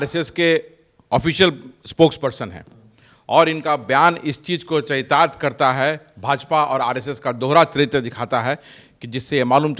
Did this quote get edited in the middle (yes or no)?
no